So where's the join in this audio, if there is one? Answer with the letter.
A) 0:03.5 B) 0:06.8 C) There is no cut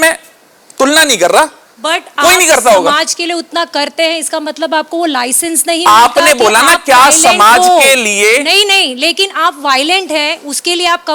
C